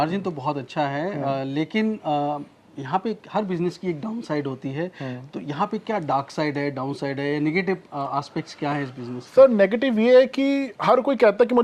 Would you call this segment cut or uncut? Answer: uncut